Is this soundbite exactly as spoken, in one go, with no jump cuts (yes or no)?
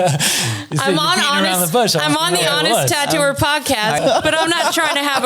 no